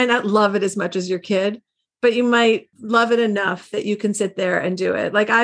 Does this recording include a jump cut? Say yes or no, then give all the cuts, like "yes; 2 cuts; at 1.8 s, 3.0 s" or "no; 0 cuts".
yes; 1 cut; at 2.7 s